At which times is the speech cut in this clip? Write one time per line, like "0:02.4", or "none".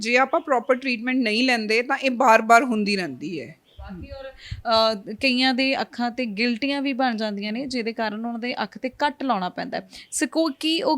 none

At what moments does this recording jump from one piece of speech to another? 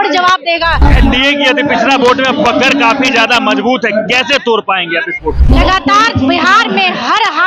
0:00.9
0:05.4

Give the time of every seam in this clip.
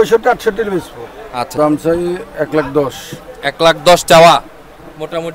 0:01.5

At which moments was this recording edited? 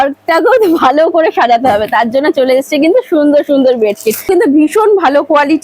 0:04.3

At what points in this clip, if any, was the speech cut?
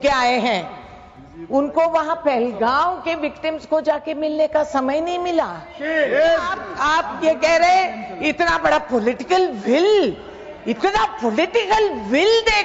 0:06.6

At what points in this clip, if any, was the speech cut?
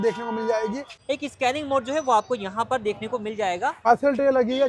0:00.9
0:03.9

